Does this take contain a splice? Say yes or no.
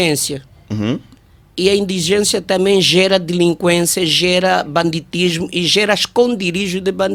no